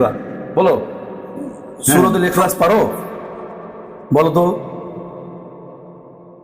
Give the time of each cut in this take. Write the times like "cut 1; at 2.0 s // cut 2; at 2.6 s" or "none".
cut 1; at 2.0 s